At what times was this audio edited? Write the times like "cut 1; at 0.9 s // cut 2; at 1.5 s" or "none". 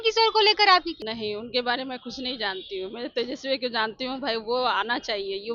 cut 1; at 1.0 s